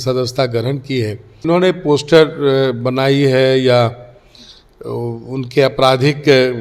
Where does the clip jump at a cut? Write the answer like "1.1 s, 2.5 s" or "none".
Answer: 1.5 s